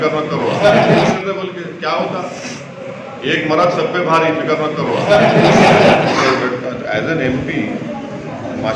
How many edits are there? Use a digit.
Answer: 2